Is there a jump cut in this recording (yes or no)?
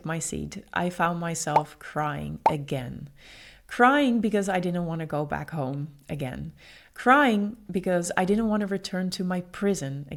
no